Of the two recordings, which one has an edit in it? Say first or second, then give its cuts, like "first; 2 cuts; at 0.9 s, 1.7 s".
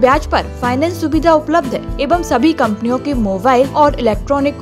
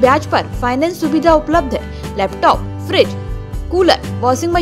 first; 2 cuts; at 1.9 s, 3.7 s